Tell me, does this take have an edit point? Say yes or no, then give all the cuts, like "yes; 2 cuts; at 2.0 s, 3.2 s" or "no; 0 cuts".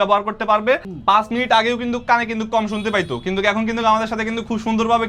yes; 1 cut; at 0.9 s